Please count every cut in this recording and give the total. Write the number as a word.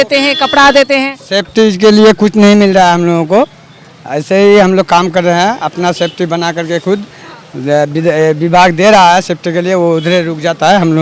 zero